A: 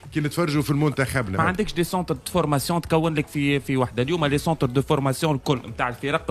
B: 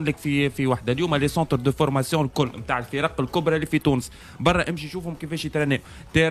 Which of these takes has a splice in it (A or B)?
A